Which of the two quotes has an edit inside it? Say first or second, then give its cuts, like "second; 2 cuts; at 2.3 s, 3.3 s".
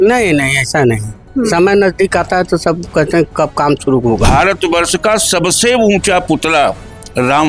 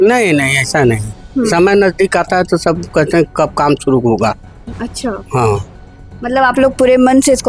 first; 1 cut; at 4.3 s